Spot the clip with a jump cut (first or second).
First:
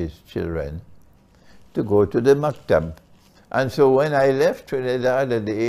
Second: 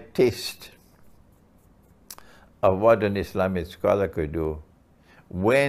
first